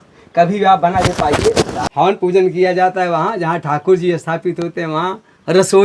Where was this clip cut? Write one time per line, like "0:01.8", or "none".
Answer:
0:01.8